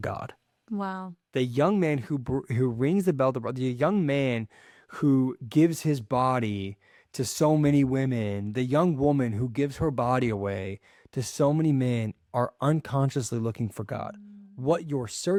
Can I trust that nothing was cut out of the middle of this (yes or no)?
yes